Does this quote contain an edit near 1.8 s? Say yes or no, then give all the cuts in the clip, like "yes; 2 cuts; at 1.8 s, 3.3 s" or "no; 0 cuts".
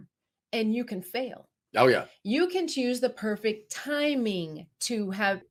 no; 0 cuts